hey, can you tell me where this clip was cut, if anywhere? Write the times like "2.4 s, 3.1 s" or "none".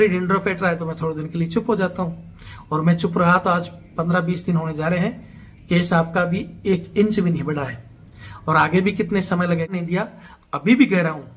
9.7 s